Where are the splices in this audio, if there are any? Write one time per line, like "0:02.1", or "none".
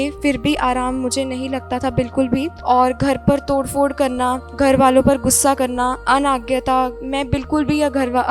0:02.5
0:04.5
0:06.0
0:07.0